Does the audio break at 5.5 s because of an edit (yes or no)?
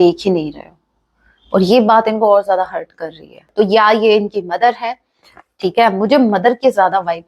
no